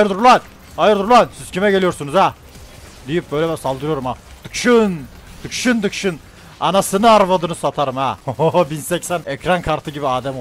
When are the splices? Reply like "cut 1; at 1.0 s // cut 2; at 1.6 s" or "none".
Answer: cut 1; at 8.2 s // cut 2; at 9.3 s